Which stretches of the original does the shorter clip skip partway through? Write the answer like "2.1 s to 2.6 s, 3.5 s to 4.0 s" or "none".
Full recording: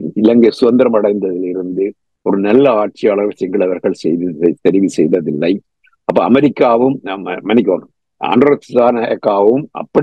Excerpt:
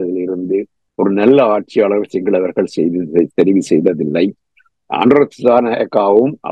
5.9 s to 8.0 s